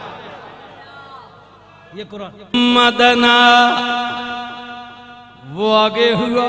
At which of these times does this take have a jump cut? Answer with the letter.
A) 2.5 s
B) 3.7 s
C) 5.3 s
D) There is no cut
A